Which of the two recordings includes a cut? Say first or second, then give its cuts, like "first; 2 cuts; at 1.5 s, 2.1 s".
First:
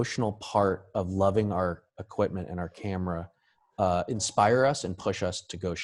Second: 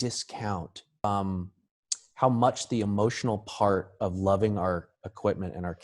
second; 1 cut; at 1.0 s